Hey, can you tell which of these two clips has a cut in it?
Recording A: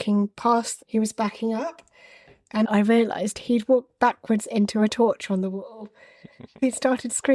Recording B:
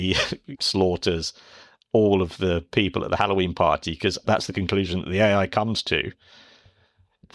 A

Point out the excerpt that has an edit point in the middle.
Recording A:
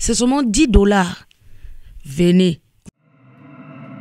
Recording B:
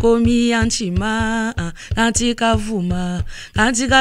A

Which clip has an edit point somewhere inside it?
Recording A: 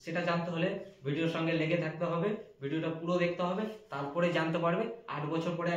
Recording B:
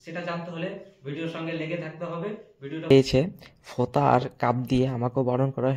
B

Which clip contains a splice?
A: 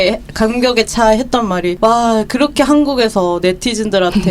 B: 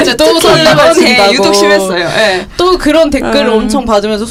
A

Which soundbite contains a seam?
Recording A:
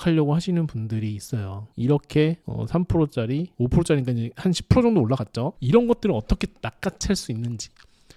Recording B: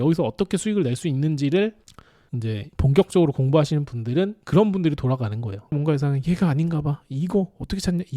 B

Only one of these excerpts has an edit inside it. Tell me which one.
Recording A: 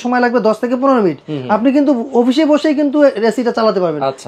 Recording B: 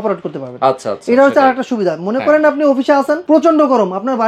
B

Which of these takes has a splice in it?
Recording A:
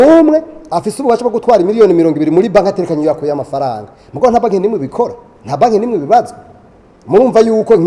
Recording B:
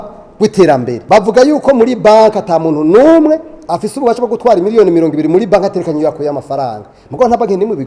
B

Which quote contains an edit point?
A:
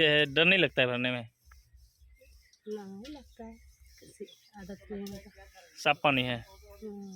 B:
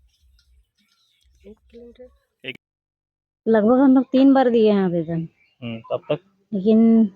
B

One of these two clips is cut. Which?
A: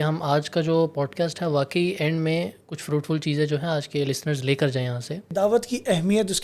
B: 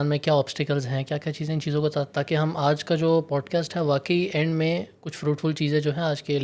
A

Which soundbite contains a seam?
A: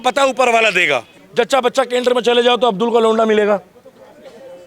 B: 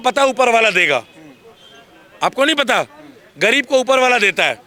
A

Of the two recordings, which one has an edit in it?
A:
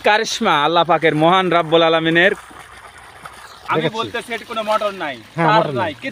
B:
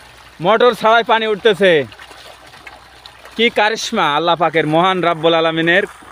A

